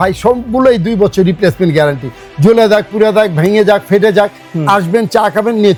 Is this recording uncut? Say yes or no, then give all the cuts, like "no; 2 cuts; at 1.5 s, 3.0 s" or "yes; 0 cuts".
yes; 0 cuts